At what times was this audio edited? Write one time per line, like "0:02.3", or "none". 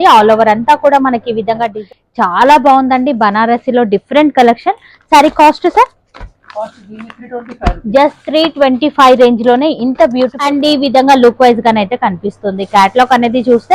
0:01.7
0:10.4